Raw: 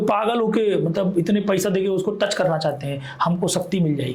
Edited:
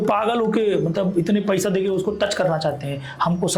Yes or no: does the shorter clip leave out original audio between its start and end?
no